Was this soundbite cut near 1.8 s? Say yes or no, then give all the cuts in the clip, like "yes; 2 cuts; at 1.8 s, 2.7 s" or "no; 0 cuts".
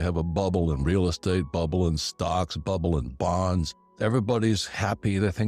no; 1 cut; at 3.8 s